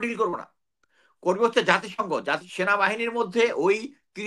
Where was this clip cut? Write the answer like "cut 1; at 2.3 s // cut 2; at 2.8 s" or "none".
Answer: cut 1; at 2.4 s